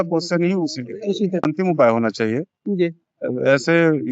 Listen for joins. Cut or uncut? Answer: cut